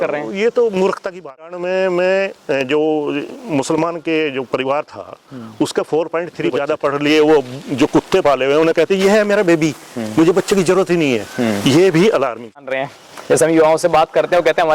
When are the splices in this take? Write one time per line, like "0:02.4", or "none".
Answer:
0:01.5
0:06.6
0:12.7